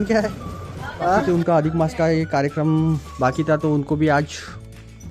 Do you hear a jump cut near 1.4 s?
yes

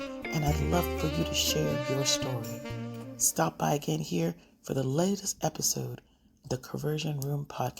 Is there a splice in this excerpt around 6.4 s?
yes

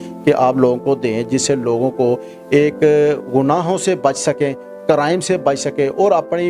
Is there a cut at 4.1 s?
no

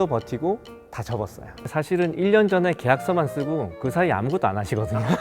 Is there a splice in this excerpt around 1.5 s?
yes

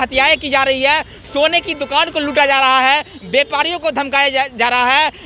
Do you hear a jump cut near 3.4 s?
no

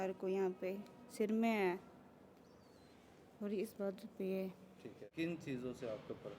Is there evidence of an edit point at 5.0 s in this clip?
yes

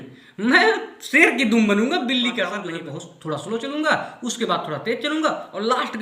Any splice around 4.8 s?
no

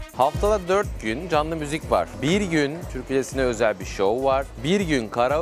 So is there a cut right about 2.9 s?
yes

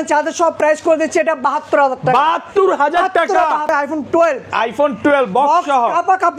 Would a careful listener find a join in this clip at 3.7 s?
yes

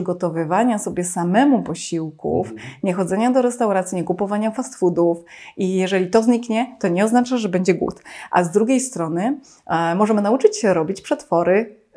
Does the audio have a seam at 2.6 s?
no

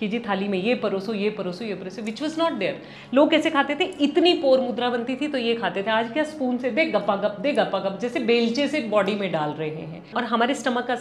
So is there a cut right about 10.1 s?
yes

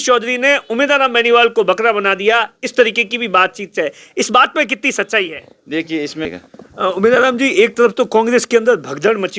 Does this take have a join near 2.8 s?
no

